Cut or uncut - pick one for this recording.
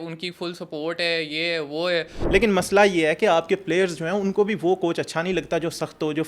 cut